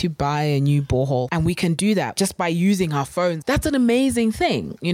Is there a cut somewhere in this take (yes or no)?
yes